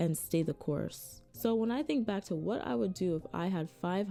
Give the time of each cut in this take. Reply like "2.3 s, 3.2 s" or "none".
none